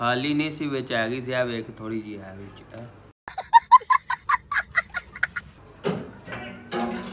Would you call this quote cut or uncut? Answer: uncut